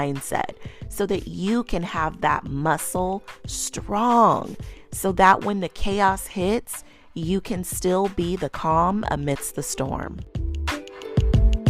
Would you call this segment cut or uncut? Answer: cut